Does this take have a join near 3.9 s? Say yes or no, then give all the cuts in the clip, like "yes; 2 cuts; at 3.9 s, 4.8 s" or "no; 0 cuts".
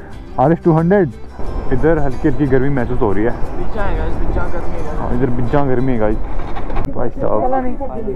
no; 2 cuts; at 1.2 s, 6.9 s